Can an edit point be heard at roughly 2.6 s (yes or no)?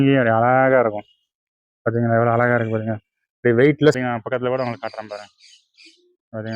no